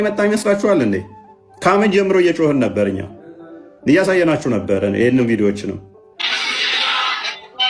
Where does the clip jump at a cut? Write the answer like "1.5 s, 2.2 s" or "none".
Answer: none